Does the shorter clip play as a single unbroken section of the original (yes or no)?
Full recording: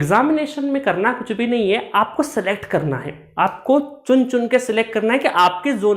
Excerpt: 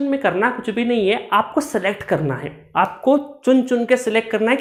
yes